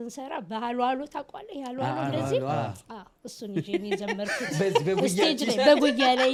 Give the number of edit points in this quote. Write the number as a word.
zero